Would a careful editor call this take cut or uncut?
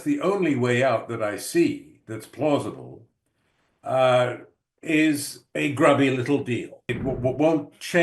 cut